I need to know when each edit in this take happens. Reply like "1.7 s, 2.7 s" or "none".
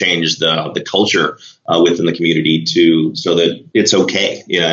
3.6 s